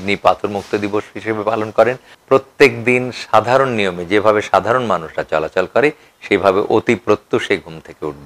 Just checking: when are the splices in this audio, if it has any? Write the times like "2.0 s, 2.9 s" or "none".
2.1 s